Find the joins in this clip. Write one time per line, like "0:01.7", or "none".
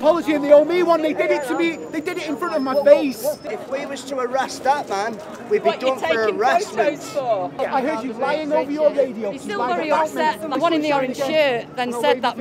0:03.4
0:07.6
0:10.5

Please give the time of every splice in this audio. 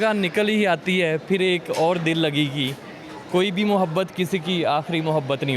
none

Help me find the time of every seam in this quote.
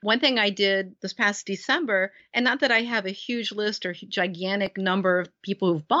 0:01.0
0:02.2

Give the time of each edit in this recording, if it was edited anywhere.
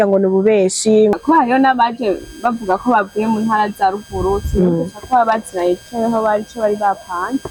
0:01.1

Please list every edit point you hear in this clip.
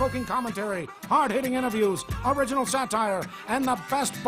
0:00.9
0:02.1
0:03.4

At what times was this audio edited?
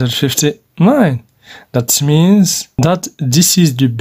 0:02.6

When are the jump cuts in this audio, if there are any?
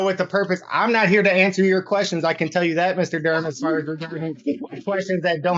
none

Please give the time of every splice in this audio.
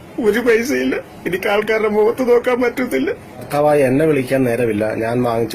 0:03.5

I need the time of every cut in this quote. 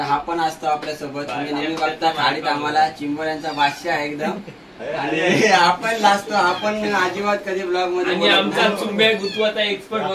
none

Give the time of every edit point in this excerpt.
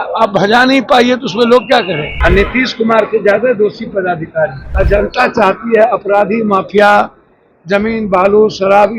0:02.1
0:04.6

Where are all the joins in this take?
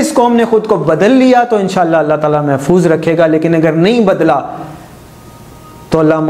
none

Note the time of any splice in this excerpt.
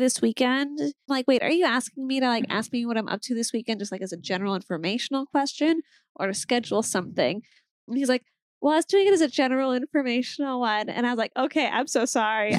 0:01.1

